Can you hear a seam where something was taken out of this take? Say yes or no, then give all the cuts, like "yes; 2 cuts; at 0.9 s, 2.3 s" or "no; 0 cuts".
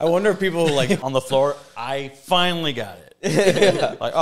yes; 1 cut; at 1.0 s